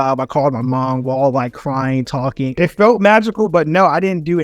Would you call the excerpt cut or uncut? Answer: cut